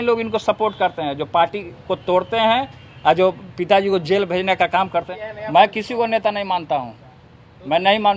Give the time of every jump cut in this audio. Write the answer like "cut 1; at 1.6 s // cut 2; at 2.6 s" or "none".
cut 1; at 5.1 s